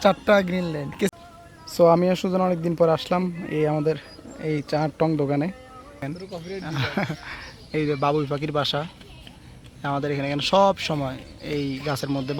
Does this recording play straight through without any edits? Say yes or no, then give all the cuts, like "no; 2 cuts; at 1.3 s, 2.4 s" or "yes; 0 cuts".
no; 2 cuts; at 1.1 s, 6.0 s